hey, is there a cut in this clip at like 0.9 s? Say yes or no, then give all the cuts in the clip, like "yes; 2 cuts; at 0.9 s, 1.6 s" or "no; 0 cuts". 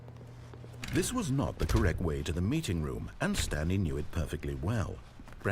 yes; 1 cut; at 0.9 s